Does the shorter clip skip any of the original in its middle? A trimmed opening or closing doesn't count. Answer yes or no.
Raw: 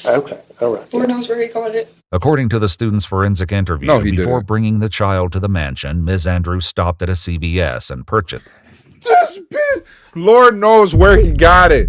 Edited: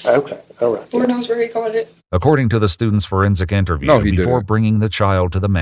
no